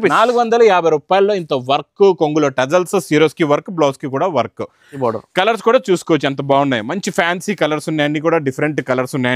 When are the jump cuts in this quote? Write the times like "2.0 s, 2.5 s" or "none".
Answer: 4.9 s